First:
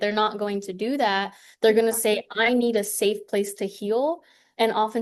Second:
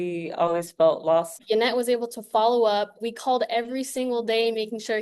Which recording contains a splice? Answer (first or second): second